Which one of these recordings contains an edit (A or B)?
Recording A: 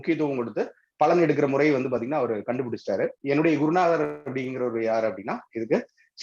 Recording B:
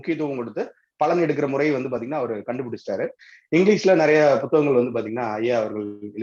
A